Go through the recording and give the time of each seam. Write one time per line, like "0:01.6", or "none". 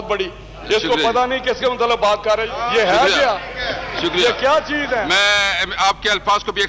0:02.5
0:05.1